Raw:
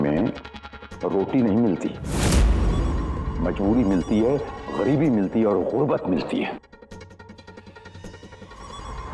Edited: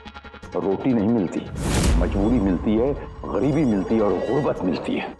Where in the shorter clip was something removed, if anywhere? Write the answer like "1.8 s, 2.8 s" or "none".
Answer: 1.9 s